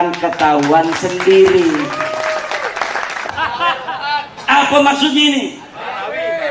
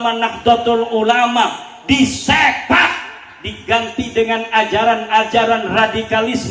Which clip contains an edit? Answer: first; 1 cut; at 3.3 s

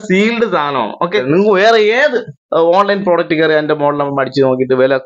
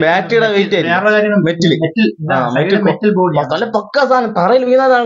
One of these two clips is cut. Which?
first; 1 cut; at 1.2 s

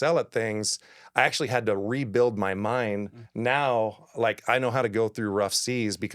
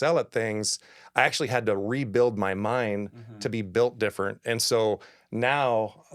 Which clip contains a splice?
first; 1 cut; at 3.2 s

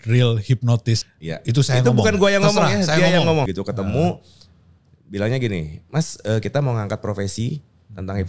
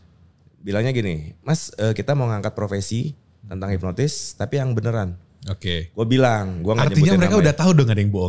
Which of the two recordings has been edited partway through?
first; 2 cuts; at 1.0 s, 3.5 s

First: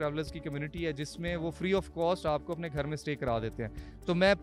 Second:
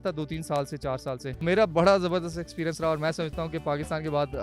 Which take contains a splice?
second; 1 cut; at 1.4 s

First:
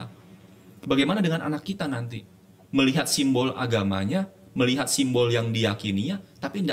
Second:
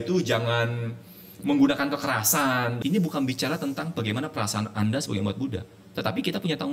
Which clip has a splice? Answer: second; 1 cut; at 2.7 s

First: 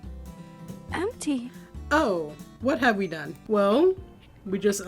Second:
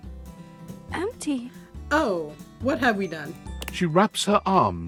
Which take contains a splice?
first; 1 cut; at 3.4 s

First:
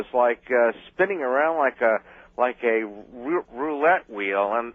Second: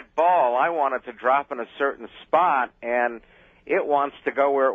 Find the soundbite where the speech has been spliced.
first; 1 cut; at 1.4 s

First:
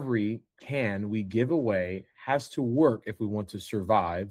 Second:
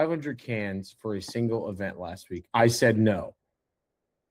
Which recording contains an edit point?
second; 1 cut; at 2.4 s

